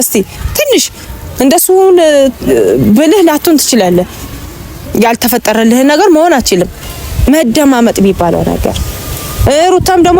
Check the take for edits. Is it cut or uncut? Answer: cut